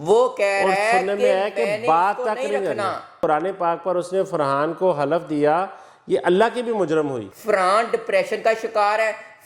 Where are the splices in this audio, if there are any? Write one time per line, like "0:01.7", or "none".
0:03.2
0:07.2